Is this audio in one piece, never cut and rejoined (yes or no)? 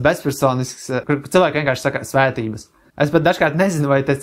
no